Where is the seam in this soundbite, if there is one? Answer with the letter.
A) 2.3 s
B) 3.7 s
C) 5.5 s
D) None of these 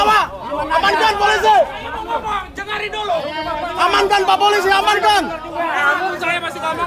D